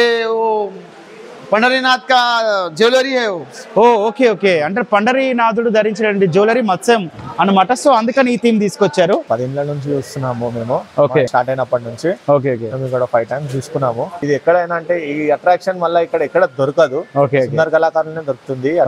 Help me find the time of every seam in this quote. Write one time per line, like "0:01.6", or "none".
0:09.2
0:14.1